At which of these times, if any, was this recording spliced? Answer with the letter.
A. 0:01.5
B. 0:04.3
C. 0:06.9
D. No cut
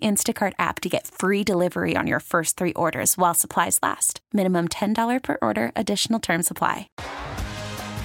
C